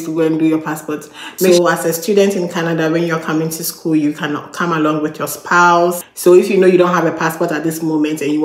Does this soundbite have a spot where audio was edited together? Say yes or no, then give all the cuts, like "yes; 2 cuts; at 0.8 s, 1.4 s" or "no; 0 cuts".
yes; 2 cuts; at 1.5 s, 6.1 s